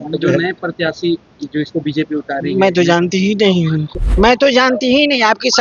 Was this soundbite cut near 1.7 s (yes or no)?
no